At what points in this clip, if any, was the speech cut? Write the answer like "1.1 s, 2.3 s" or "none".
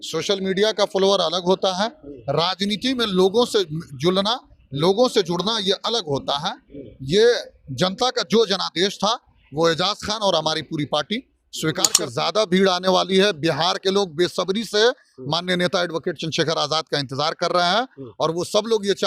11.9 s